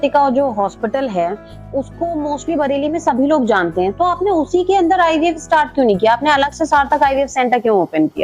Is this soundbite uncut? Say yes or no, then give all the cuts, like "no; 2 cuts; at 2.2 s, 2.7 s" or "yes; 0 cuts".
yes; 0 cuts